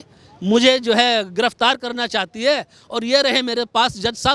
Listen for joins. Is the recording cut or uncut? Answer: uncut